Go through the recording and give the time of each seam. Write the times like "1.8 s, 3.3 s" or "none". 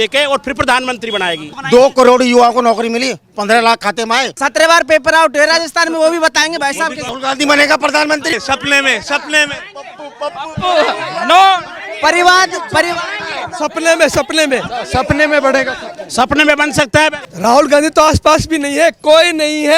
1.5 s, 4.4 s, 7.1 s, 8.3 s, 17.2 s